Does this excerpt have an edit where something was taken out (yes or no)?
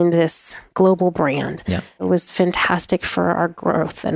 yes